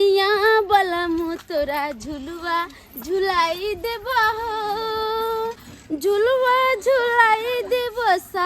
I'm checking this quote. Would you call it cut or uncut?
cut